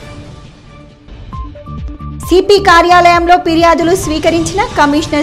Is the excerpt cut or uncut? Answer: cut